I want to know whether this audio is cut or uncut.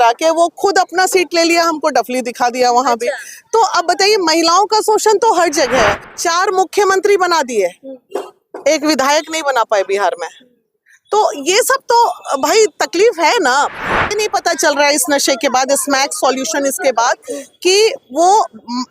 cut